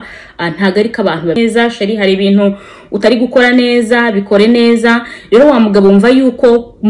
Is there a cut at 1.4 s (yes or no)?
yes